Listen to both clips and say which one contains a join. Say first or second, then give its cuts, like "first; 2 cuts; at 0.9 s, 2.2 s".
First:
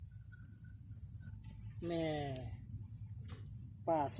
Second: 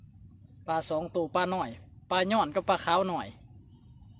first; 1 cut; at 1.3 s